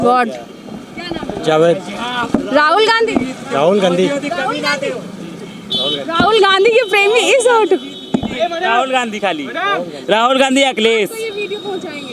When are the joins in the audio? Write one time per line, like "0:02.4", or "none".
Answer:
none